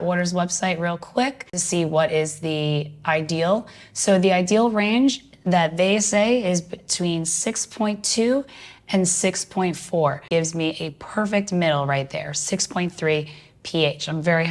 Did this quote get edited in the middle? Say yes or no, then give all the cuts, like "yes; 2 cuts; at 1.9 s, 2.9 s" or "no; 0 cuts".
yes; 1 cut; at 10.3 s